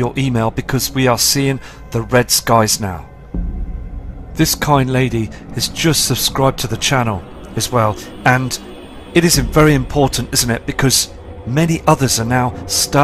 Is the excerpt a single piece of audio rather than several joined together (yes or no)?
yes